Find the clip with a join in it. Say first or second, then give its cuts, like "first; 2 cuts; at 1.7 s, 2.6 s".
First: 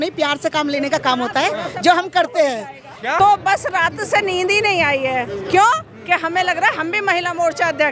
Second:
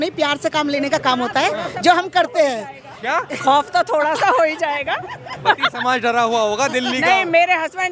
first; 1 cut; at 3.2 s